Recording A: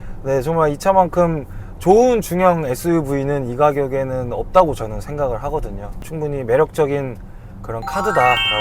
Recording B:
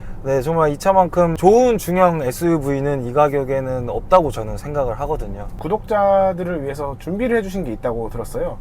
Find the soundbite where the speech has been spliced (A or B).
B